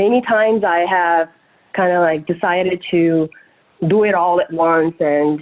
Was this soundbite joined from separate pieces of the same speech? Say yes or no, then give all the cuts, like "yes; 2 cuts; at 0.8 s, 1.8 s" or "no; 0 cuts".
no; 0 cuts